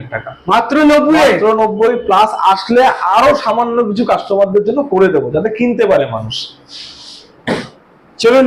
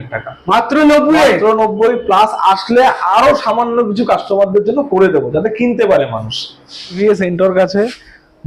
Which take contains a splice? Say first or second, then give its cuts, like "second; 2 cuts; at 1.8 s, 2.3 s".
second; 1 cut; at 7.0 s